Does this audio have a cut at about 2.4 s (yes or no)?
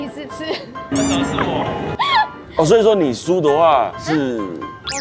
yes